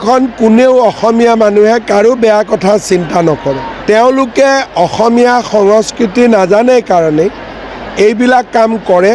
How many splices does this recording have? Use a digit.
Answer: 1